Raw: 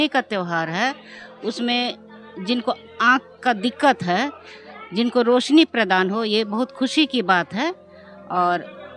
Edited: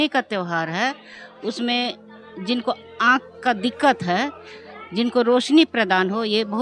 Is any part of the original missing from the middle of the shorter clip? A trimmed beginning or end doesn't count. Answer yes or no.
no